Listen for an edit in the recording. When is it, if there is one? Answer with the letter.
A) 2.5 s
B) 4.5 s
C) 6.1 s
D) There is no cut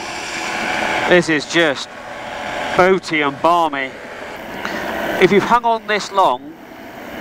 B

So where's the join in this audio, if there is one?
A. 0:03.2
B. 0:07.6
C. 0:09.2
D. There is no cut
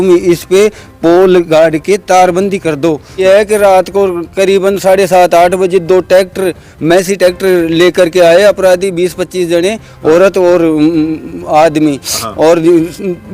A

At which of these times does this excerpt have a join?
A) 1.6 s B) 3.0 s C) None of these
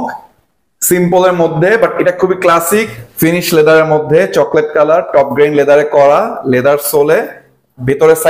B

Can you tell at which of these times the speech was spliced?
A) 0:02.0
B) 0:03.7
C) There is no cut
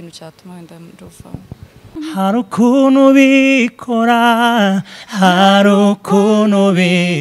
A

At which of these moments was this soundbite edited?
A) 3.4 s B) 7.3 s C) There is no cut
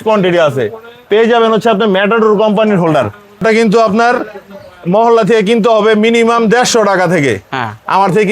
A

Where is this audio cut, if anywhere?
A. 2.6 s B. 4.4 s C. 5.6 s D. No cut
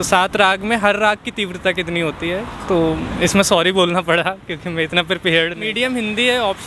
C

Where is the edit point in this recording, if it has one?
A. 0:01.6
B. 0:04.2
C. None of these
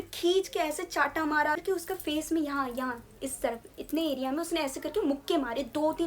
A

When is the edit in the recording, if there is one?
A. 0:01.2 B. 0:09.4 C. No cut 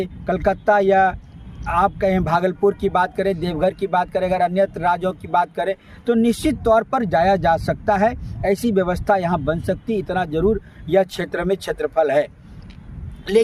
C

